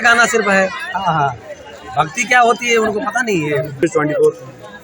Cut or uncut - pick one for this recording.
cut